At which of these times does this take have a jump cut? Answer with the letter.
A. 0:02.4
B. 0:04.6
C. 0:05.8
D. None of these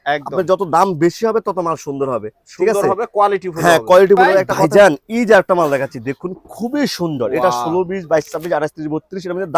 B